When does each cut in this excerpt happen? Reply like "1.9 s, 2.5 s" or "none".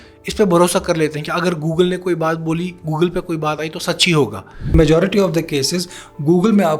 4.7 s

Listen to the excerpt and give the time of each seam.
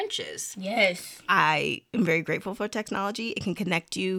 1.1 s

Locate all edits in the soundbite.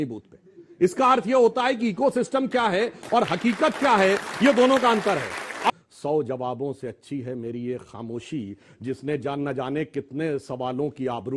5.7 s

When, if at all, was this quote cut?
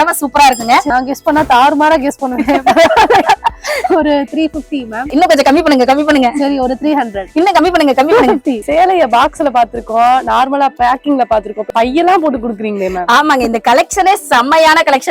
0.9 s, 5.1 s, 7.2 s, 8.6 s, 11.7 s

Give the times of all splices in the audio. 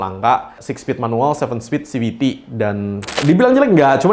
3.2 s

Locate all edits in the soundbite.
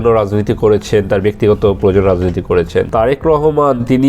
2.9 s

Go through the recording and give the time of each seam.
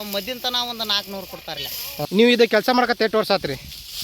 2.0 s

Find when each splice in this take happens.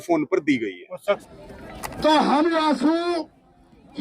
1.2 s

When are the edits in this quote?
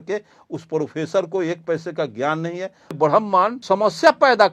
3.0 s, 3.6 s

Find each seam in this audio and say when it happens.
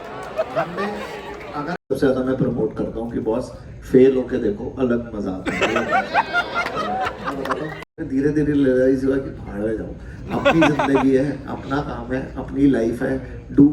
1.8 s, 7.8 s

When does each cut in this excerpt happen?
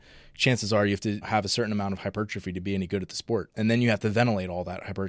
1.2 s, 3.5 s

